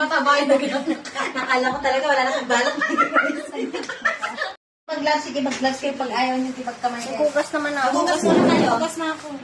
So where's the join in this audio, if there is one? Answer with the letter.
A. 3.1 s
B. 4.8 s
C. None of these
B